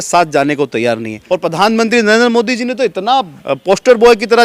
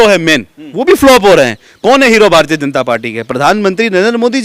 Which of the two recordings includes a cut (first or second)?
first